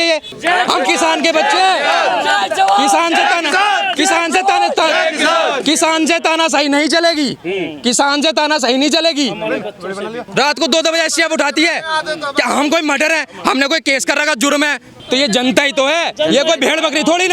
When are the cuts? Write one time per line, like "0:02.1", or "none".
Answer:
0:10.2
0:14.9